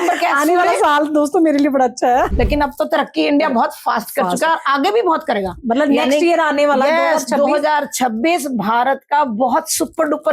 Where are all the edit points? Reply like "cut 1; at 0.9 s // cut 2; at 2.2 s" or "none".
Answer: cut 1; at 2.3 s